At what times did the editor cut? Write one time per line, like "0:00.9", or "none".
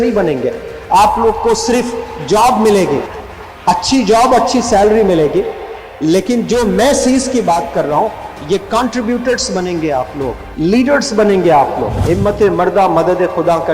0:10.4
0:11.9